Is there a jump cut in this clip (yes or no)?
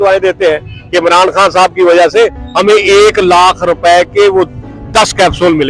no